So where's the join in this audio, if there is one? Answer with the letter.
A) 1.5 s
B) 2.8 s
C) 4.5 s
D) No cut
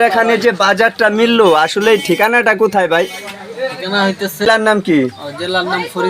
C